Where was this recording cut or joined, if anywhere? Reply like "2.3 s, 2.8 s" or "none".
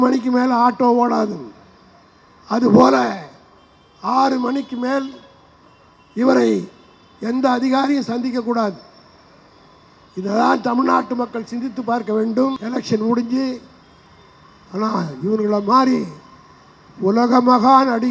12.6 s